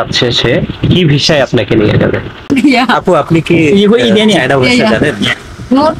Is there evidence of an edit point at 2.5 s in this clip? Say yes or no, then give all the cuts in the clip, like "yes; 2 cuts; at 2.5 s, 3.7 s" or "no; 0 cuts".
yes; 1 cut; at 2.5 s